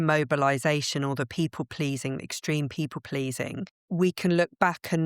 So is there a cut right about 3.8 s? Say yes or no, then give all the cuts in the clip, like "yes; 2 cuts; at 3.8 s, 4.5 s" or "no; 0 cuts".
yes; 1 cut; at 3.8 s